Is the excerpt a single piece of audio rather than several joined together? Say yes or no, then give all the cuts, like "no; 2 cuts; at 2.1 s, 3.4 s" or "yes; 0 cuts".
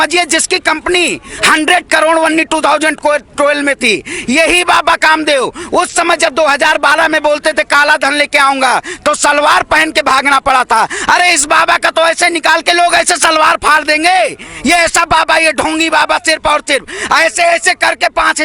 yes; 0 cuts